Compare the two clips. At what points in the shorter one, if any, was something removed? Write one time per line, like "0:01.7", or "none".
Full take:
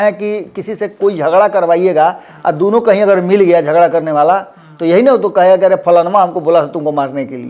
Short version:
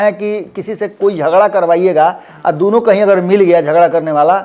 none